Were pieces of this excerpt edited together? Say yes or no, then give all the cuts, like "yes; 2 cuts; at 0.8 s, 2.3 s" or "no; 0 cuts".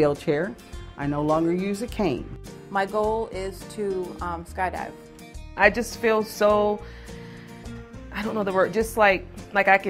yes; 2 cuts; at 2.4 s, 5.4 s